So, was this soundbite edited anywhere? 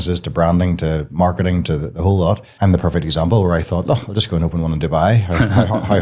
yes; 1 cut; at 2.5 s

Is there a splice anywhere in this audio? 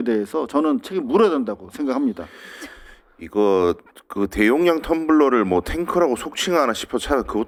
no; 0 cuts

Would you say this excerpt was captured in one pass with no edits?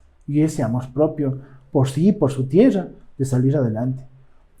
yes; 0 cuts

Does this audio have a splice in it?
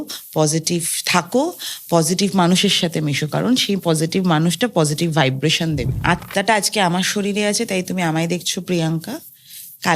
yes; 1 cut; at 5.9 s

